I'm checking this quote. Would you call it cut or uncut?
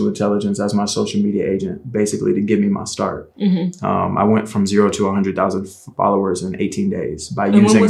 uncut